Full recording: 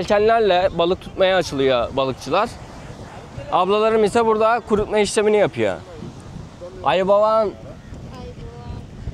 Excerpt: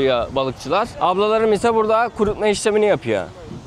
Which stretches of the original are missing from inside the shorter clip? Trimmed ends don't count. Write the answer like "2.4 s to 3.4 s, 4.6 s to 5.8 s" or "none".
2.5 s to 3.4 s

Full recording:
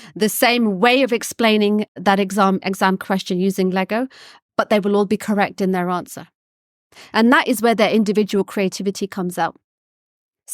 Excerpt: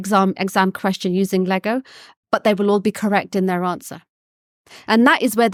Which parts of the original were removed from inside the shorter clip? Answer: none

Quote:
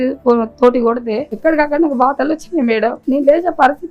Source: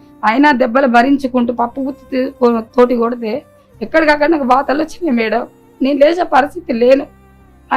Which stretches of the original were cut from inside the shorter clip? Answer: 3.4 s to 3.7 s, 5.5 s to 5.7 s

